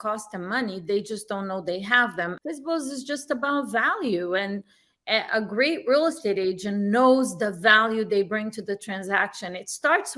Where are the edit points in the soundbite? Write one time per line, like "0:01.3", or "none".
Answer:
0:02.4